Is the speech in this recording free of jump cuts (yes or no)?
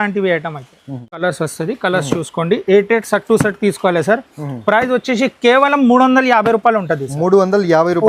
no